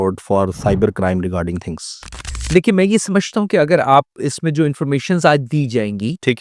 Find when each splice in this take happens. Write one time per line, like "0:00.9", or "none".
0:02.5